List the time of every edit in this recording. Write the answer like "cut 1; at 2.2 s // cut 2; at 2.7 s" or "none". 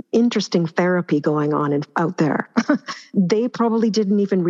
cut 1; at 1.9 s // cut 2; at 3.1 s

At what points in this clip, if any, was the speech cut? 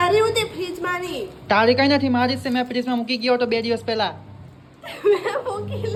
none

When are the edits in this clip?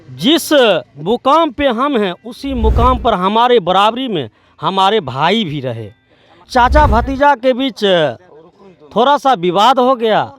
cut 1; at 6.5 s

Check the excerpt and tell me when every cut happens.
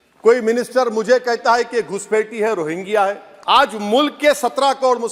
cut 1; at 3.3 s

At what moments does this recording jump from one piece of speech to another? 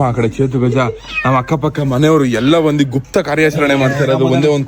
none

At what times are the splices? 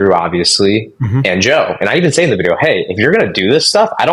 none

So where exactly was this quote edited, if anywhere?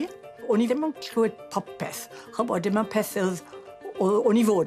none

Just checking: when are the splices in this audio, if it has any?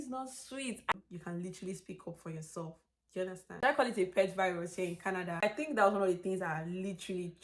cut 1; at 0.9 s // cut 2; at 3.6 s // cut 3; at 5.4 s

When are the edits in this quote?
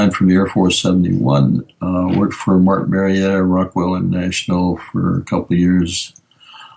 none

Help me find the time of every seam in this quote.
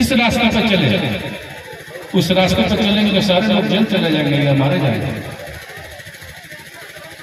none

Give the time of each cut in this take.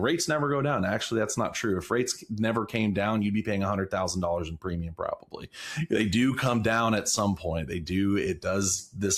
none

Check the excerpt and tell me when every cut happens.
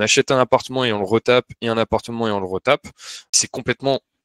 cut 1; at 3.3 s

